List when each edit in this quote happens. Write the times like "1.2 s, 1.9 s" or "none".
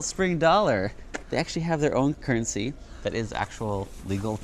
2.2 s